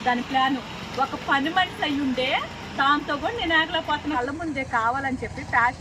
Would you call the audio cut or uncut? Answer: cut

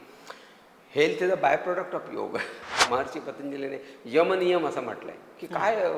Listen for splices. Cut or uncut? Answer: cut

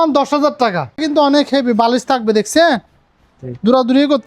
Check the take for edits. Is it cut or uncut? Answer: cut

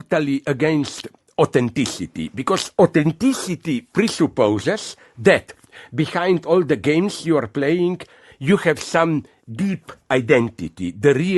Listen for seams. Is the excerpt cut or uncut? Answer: cut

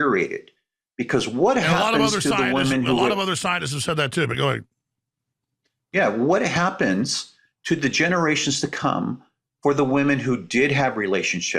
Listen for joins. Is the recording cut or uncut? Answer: uncut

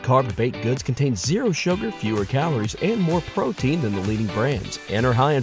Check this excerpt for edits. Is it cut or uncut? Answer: uncut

